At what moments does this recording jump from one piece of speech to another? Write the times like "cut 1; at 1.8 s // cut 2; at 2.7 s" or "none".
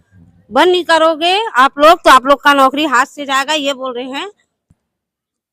cut 1; at 4.5 s